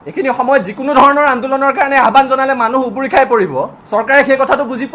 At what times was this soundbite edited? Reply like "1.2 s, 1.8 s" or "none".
3.8 s